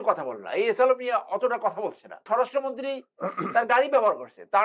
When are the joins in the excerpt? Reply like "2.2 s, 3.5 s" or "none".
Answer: 2.2 s